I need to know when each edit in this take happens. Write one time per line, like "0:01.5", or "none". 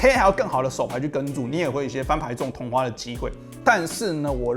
0:03.5